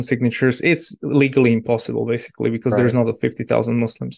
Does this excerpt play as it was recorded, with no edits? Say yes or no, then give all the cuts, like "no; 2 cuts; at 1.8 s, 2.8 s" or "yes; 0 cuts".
yes; 0 cuts